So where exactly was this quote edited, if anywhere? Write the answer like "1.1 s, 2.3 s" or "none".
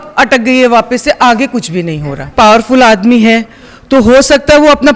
2.3 s